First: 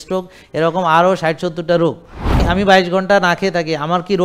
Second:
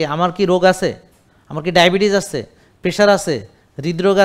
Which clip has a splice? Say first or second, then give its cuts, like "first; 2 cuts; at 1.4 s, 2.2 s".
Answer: first; 1 cut; at 2.4 s